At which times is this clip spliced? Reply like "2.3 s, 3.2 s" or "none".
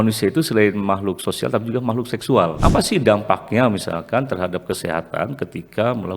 2.6 s